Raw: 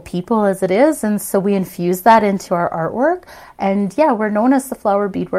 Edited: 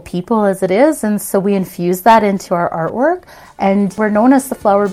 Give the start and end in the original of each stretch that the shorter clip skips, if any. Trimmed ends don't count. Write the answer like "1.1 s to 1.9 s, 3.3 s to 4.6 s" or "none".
4.0 s to 4.2 s